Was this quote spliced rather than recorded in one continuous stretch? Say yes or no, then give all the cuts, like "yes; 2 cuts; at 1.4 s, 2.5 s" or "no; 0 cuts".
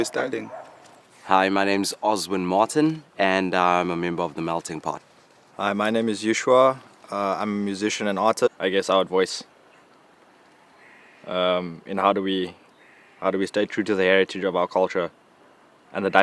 no; 0 cuts